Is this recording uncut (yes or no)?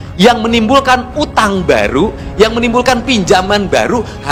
yes